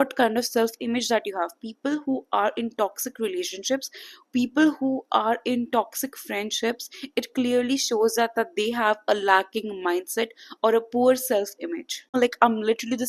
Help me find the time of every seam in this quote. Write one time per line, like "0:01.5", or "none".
0:12.1